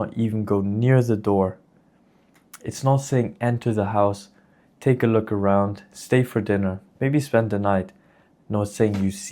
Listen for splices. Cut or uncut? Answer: uncut